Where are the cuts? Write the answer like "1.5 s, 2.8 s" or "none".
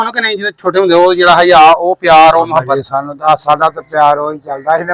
none